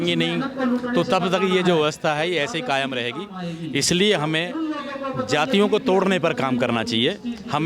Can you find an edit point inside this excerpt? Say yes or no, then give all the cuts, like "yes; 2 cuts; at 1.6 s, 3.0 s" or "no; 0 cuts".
no; 0 cuts